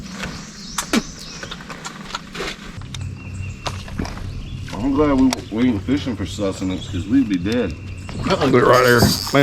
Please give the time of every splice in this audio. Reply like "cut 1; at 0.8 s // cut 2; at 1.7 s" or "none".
cut 1; at 2.8 s